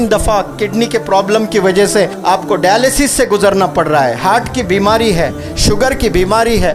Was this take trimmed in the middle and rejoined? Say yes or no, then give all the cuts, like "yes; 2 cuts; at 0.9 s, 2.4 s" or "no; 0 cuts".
yes; 1 cut; at 2.2 s